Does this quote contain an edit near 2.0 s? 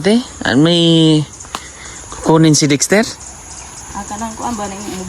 no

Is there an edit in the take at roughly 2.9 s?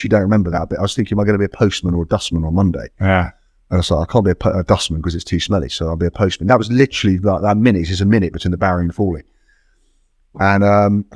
no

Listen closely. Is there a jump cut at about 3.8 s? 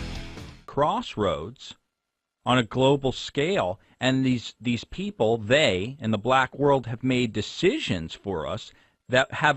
yes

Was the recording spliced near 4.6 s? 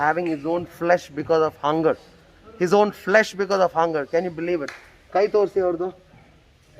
no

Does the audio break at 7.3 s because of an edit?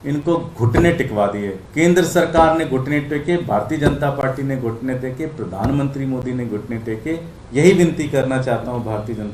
yes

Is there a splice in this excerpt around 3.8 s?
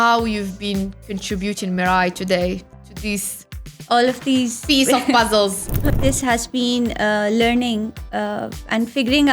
no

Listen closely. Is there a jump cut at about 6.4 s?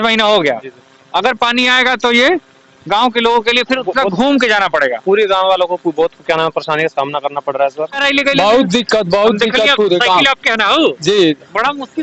no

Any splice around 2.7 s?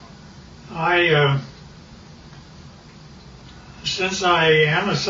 yes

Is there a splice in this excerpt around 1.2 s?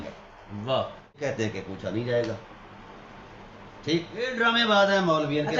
yes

